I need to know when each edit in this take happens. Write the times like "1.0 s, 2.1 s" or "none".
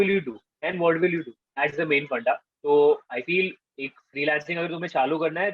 2.5 s

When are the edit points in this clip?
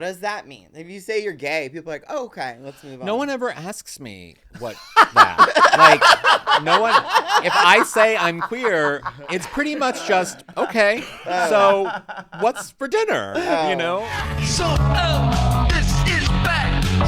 14.1 s

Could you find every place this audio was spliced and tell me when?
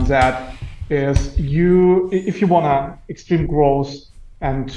none

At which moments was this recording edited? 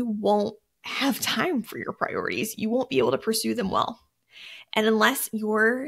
none

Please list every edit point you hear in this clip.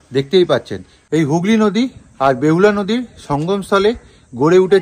0.9 s

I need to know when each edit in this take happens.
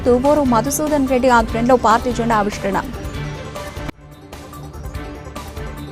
none

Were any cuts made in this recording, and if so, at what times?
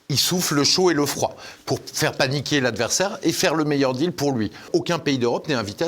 4.6 s

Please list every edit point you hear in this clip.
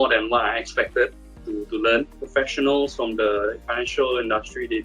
2.2 s, 3.6 s

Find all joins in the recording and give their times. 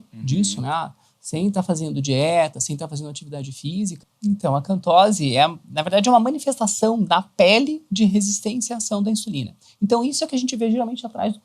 4.0 s

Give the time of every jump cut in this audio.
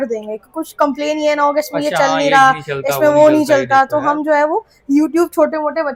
none

